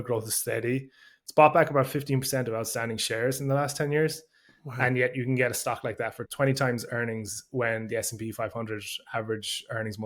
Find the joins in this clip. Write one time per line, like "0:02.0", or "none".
none